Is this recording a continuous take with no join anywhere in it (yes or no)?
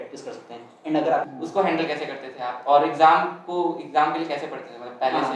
no